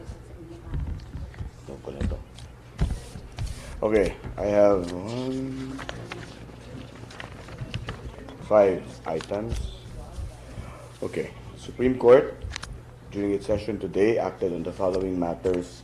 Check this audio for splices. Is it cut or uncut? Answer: uncut